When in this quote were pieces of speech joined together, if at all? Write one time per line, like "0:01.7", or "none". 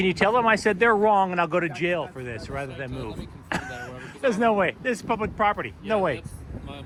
none